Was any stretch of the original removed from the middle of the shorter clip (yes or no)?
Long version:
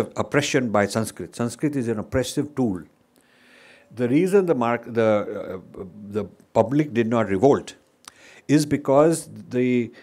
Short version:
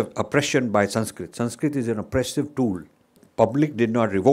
yes